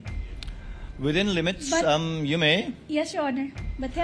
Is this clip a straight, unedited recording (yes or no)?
yes